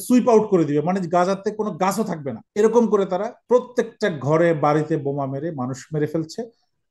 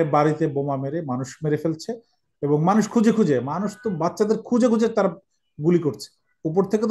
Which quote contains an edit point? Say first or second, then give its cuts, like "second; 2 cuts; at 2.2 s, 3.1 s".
first; 2 cuts; at 2.4 s, 3.3 s